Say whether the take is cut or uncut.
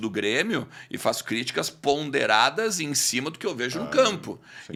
uncut